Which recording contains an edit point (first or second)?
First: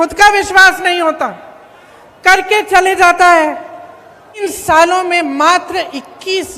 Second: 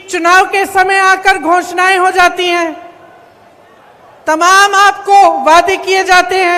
first